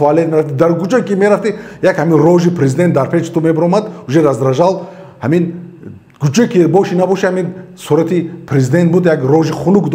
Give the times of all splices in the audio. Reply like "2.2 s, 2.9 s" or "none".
none